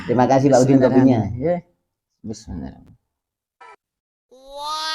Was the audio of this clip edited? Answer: yes; 1 cut; at 3.6 s

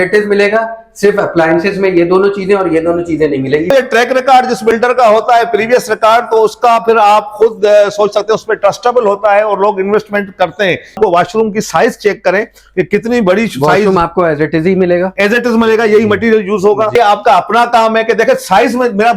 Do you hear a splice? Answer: yes; 3 cuts; at 3.7 s, 11.0 s, 16.9 s

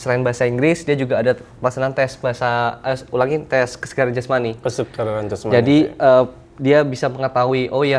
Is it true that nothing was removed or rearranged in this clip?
yes; 0 cuts

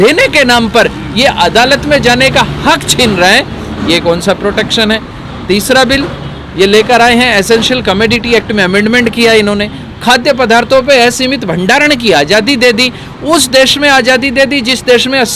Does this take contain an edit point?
no; 0 cuts

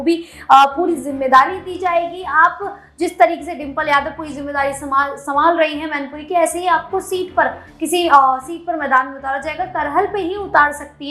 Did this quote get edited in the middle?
no; 0 cuts

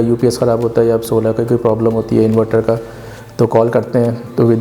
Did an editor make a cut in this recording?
no; 0 cuts

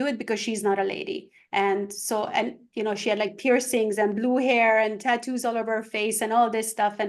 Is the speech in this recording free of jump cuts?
yes; 0 cuts

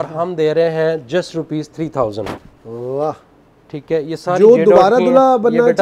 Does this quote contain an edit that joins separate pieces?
no; 0 cuts

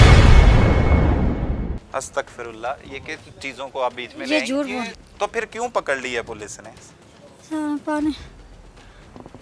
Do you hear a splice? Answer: yes; 1 cut; at 5.0 s

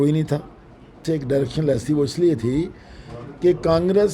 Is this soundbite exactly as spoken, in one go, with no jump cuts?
no; 1 cut; at 1.0 s

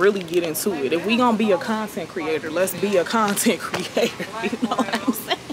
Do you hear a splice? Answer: no; 0 cuts

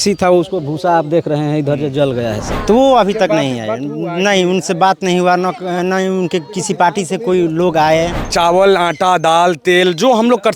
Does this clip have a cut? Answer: yes; 2 cuts; at 2.4 s, 8.2 s

